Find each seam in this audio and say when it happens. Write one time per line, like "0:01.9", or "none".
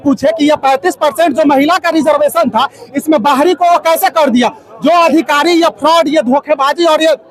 none